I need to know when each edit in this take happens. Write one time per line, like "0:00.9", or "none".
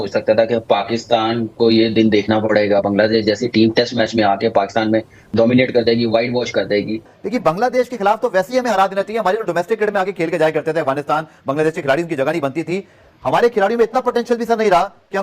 0:07.0